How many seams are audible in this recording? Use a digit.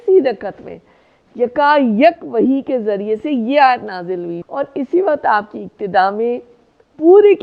1